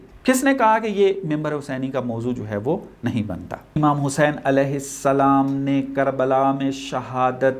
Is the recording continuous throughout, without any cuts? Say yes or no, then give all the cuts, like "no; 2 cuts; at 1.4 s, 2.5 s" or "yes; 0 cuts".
no; 1 cut; at 3.7 s